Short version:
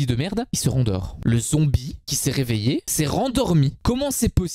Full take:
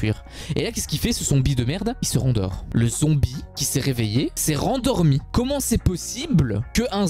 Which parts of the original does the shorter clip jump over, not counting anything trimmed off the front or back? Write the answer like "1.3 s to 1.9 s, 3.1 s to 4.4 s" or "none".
none